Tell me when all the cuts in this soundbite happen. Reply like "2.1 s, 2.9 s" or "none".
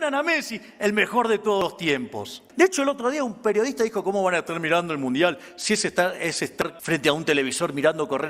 2.4 s, 6.8 s

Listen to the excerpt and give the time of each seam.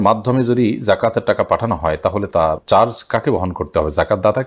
none

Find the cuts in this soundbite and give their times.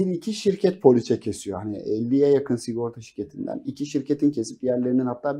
none

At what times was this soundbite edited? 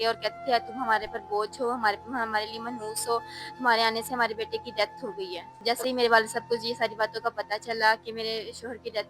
5.4 s

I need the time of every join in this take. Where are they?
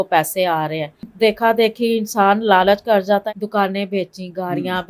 1.1 s, 3.2 s

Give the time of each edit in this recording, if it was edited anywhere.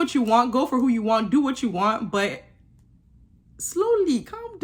none

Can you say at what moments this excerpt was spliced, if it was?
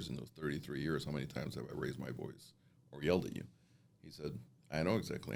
none

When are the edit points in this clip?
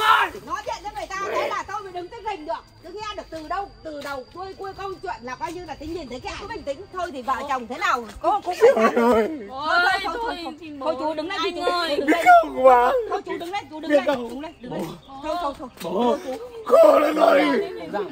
6.5 s

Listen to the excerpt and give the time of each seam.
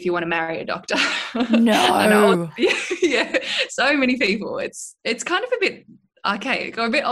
none

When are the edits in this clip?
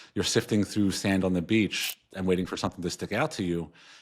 none

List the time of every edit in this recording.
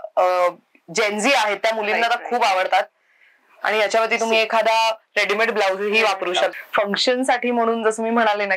6.5 s

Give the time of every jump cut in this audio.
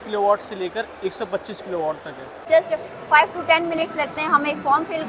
2.5 s

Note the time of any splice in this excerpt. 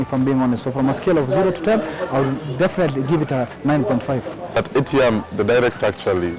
4.5 s

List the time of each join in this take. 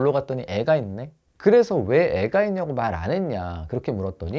none

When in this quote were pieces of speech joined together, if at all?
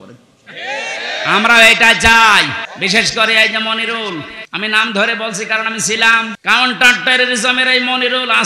2.6 s, 4.4 s, 6.4 s

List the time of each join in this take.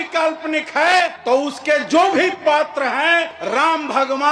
1.2 s, 3.4 s

